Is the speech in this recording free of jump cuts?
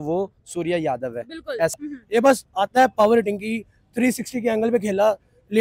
no; 1 cut; at 1.9 s

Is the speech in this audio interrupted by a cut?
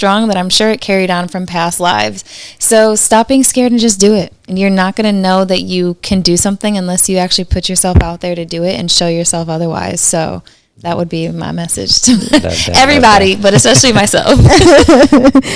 no; 0 cuts

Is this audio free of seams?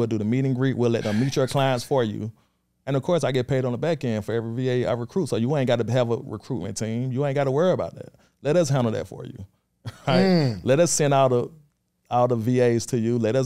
yes; 0 cuts

